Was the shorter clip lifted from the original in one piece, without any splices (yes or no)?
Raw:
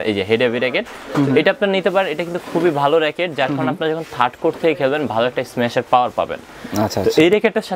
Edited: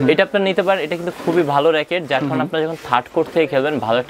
yes